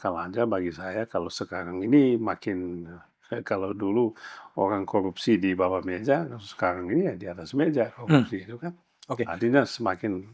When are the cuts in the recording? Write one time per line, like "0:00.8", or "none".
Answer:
none